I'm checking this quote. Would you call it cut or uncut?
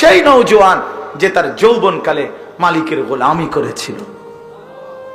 cut